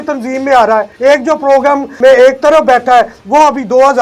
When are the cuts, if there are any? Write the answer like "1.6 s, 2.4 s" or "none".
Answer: 0.9 s, 1.9 s